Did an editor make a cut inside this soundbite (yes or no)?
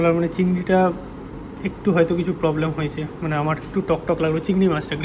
no